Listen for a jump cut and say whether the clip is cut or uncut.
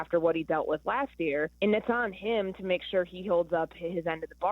cut